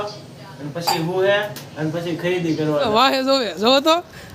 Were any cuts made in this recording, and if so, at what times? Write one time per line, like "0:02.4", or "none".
0:02.9